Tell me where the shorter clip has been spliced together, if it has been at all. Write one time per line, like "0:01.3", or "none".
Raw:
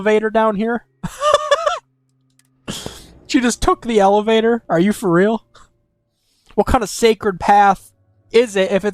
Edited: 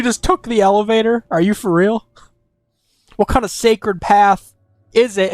none